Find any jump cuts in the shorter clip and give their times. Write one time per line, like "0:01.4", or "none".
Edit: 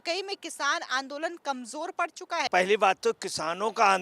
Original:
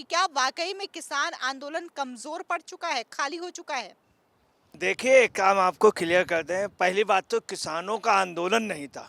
0:02.5